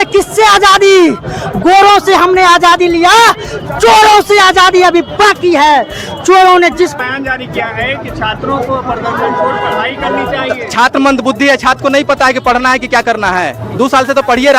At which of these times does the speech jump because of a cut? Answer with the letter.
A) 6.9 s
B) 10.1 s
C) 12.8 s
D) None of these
A